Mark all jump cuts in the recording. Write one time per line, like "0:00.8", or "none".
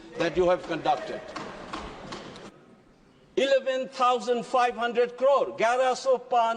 0:02.3